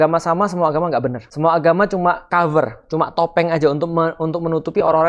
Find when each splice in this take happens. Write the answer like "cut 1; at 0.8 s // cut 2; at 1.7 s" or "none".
cut 1; at 1.2 s // cut 2; at 2.2 s